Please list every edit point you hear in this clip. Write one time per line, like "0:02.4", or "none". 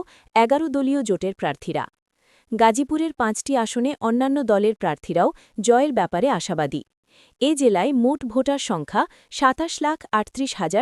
none